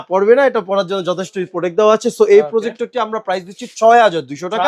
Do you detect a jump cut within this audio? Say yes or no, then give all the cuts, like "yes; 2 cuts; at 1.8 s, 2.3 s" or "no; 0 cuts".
no; 0 cuts